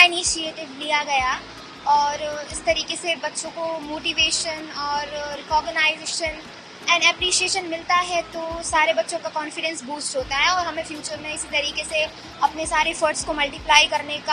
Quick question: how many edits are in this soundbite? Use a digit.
0